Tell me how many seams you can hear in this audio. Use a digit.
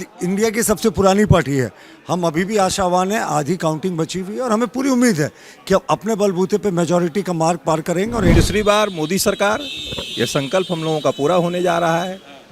1